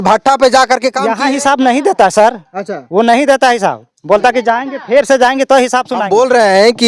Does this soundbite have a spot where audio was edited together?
yes; 2 cuts; at 1.1 s, 6.0 s

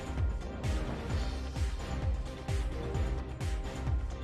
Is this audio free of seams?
yes; 0 cuts

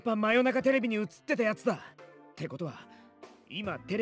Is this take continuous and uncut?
no; 1 cut; at 2.0 s

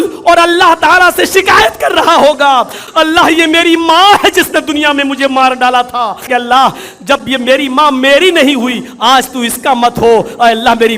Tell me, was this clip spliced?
yes; 2 cuts; at 2.8 s, 6.3 s

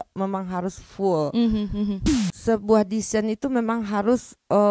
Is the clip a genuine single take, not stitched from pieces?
no; 1 cut; at 2.2 s

